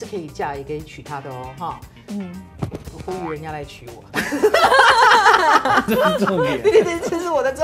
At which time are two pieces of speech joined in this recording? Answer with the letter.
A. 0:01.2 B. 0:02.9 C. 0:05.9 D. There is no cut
C